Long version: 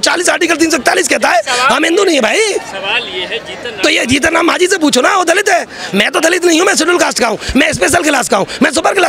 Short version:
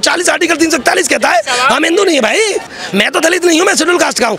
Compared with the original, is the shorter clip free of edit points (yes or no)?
no